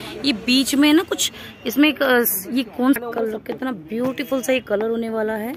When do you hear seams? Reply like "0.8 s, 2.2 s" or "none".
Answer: 3.0 s